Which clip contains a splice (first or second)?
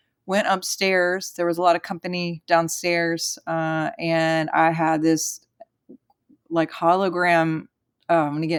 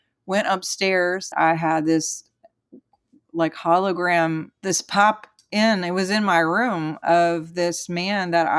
second